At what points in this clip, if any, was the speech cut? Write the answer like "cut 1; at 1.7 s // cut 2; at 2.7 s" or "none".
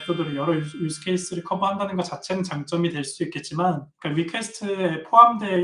cut 1; at 3.9 s